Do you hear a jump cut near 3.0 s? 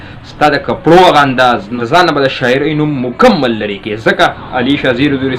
no; 2 cuts; at 1.7 s, 4.4 s

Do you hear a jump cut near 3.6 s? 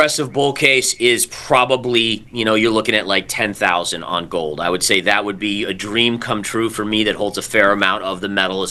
no; 0 cuts

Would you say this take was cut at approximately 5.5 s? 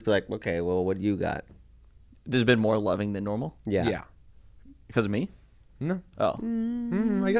no; 0 cuts

